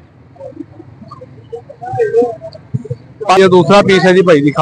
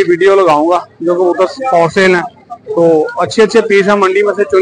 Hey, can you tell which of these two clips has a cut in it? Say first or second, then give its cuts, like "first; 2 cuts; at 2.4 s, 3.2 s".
first; 1 cut; at 3.4 s